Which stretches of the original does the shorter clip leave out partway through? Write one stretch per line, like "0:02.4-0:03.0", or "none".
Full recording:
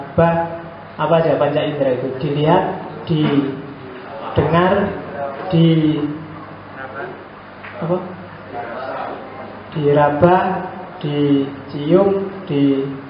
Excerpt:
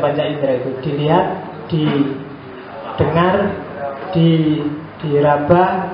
0:06.3-0:09.6